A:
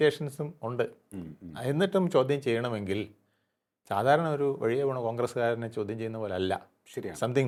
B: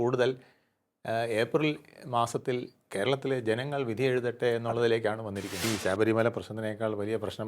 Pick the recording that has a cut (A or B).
B